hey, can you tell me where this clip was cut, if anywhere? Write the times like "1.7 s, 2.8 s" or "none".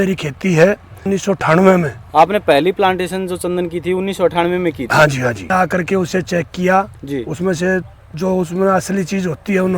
1.1 s, 5.5 s

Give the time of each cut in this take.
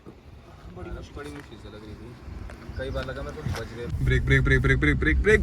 3.9 s

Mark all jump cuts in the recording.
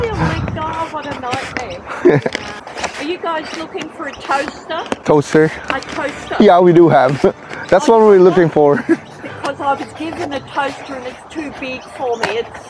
2.6 s, 5.0 s

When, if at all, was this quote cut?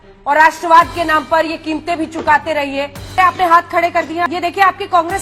3.1 s, 4.3 s

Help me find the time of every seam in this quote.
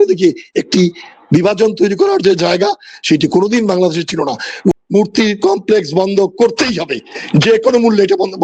4.7 s

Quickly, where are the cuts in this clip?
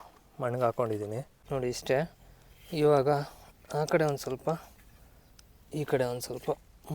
1.3 s

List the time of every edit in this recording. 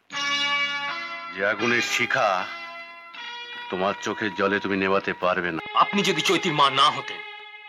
5.6 s

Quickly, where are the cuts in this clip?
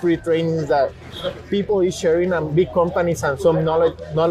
none

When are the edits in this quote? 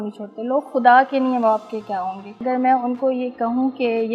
2.4 s

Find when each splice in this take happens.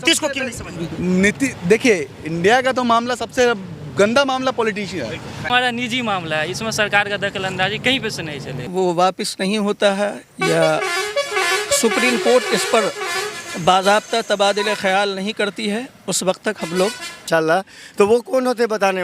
5.4 s, 8.6 s, 17.2 s

